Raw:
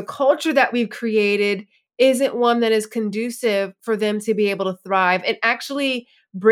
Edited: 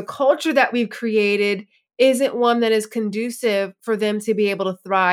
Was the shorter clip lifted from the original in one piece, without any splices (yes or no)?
yes